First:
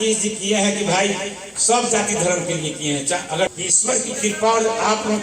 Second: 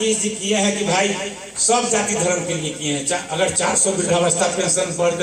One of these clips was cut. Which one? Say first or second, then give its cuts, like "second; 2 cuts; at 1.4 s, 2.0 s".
first; 1 cut; at 3.5 s